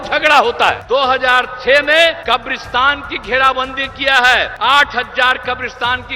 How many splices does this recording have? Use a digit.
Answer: 3